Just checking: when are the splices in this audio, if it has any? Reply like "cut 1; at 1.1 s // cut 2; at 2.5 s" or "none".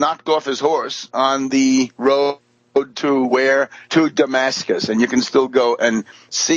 cut 1; at 3.3 s